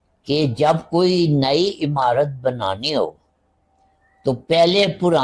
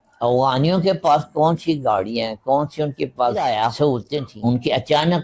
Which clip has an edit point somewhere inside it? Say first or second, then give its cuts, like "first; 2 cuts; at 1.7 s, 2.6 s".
second; 1 cut; at 4.3 s